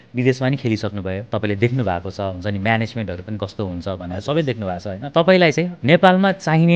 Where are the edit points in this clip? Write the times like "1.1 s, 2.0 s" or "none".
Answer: 1.2 s, 5.0 s, 5.7 s